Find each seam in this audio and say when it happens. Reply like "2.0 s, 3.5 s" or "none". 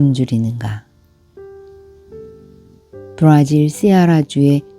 0.9 s, 2.7 s